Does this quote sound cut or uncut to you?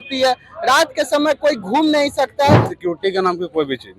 cut